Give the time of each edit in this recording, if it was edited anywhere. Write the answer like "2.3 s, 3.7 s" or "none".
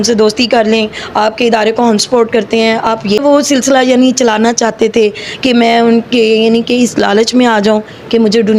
3.2 s